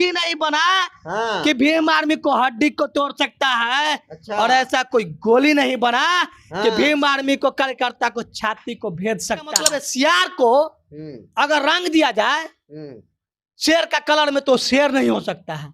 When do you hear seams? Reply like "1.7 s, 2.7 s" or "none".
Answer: 9.6 s